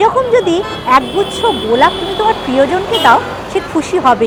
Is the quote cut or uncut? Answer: uncut